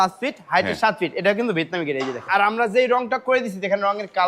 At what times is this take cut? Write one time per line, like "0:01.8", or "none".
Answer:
0:02.3